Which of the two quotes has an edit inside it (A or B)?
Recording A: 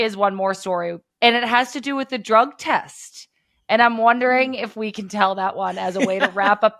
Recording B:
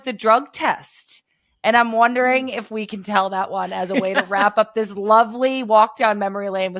A